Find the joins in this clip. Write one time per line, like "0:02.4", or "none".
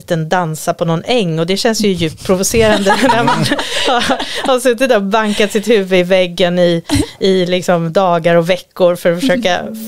none